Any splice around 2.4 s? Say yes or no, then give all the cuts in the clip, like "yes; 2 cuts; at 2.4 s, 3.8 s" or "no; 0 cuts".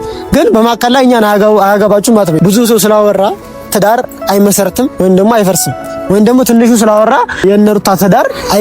yes; 2 cuts; at 2.4 s, 7.7 s